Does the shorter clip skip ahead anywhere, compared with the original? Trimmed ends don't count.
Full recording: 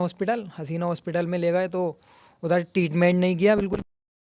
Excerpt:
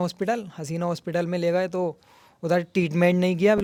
no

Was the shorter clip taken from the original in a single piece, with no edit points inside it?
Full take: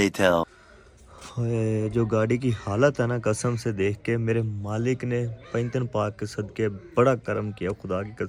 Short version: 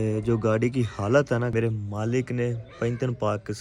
no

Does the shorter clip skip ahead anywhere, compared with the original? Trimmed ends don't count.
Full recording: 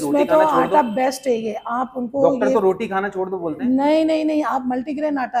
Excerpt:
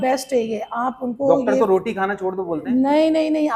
no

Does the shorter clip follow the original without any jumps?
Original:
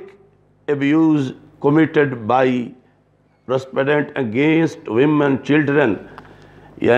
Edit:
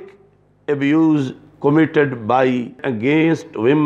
no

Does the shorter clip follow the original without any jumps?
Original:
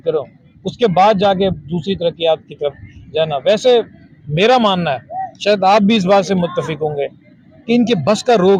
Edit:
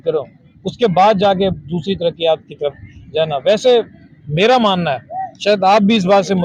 yes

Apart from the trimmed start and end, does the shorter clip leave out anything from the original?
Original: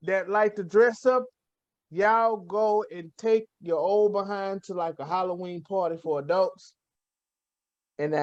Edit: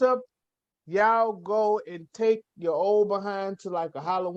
no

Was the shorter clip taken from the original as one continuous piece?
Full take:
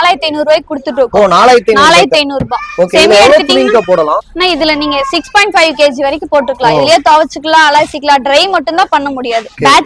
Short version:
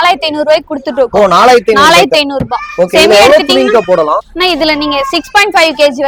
yes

